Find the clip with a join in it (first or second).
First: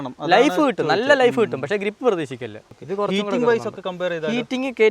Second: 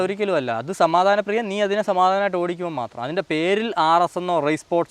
first